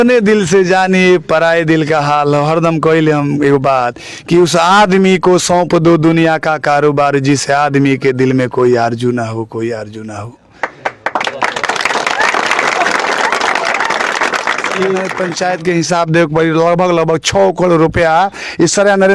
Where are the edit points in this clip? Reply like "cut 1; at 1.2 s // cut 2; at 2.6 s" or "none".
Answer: cut 1; at 15.2 s